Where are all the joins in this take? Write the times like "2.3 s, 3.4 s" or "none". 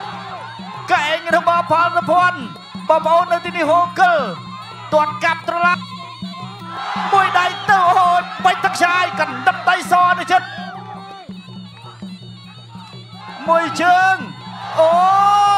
5.7 s